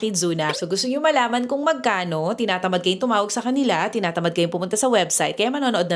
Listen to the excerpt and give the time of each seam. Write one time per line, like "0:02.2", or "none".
none